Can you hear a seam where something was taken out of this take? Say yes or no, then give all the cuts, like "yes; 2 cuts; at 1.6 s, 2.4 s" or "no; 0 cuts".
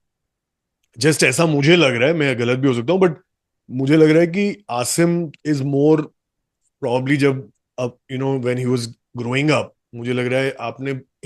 no; 0 cuts